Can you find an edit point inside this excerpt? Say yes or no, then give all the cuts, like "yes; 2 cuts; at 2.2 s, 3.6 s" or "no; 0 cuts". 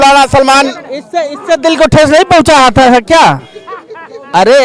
no; 0 cuts